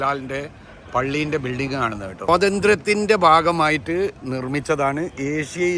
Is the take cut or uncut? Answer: cut